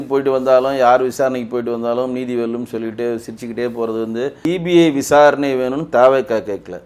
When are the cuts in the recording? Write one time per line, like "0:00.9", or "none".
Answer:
0:04.5